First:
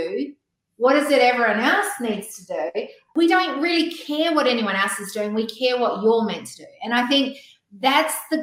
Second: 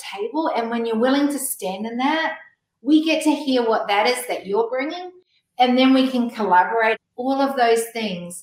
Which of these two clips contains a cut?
second; 1 cut; at 7.0 s

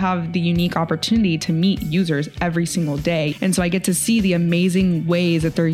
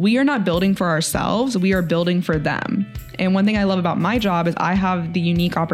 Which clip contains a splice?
first; 1 cut; at 3.3 s

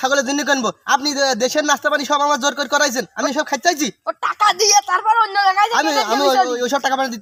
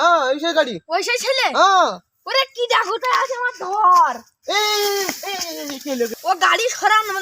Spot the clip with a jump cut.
second; 1 cut; at 6.1 s

